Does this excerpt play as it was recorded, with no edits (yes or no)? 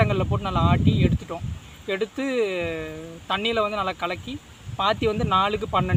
yes